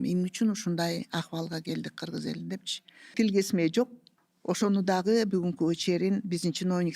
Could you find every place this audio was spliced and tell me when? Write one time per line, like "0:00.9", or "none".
0:03.0